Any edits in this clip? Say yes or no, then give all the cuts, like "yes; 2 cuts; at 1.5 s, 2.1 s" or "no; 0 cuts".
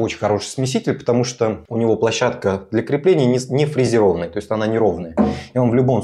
no; 0 cuts